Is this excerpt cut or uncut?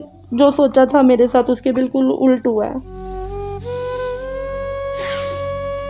cut